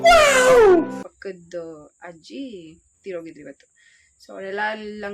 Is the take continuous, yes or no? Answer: no